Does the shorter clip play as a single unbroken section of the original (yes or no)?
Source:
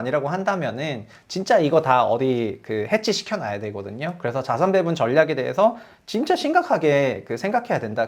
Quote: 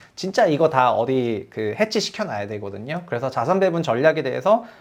yes